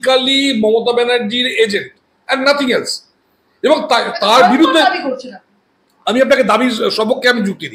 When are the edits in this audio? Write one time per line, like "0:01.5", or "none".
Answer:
none